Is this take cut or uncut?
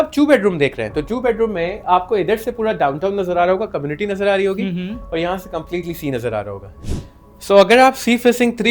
cut